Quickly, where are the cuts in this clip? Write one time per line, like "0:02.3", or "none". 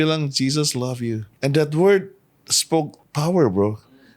0:01.3
0:03.0